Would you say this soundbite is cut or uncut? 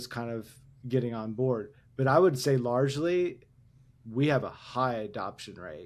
uncut